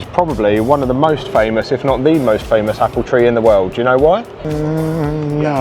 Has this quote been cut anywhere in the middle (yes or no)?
yes